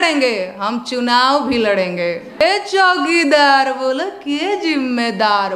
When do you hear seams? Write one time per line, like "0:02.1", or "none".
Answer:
0:02.4